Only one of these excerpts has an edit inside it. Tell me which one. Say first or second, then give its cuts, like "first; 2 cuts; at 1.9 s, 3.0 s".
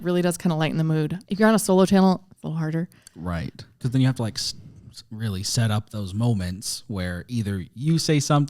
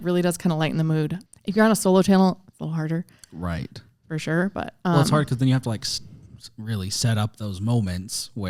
first; 2 cuts; at 1.2 s, 3.8 s